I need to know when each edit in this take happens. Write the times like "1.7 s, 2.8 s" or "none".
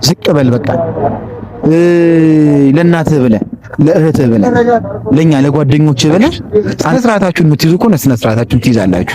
6.8 s

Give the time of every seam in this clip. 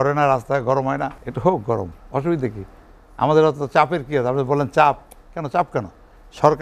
1.2 s

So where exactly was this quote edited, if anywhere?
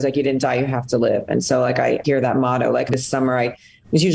2.0 s, 2.9 s

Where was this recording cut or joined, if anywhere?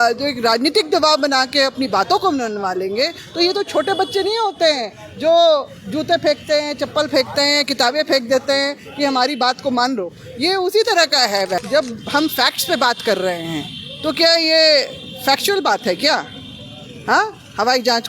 11.6 s

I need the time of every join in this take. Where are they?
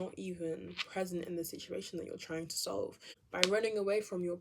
3.0 s

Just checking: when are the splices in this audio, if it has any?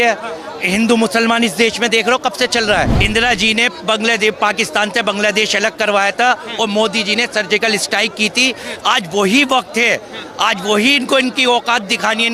3.0 s

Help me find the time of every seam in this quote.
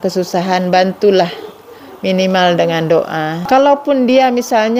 3.4 s

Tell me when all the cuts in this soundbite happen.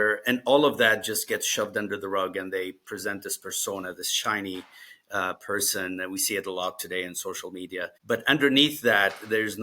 8.0 s

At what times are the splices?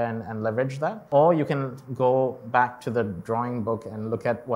1.1 s

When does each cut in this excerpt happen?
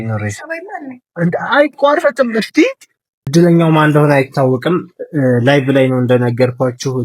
3.2 s

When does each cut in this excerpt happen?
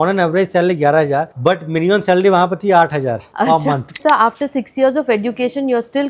1.3 s, 3.7 s

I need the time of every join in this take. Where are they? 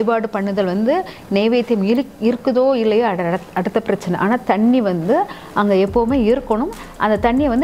none

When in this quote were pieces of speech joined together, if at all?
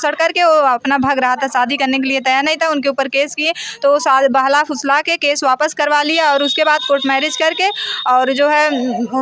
none

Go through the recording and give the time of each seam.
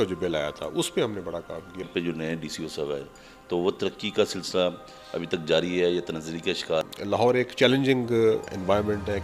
1.9 s, 6.9 s

